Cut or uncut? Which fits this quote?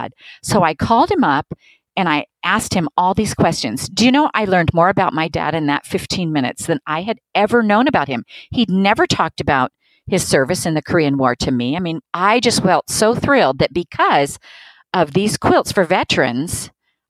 cut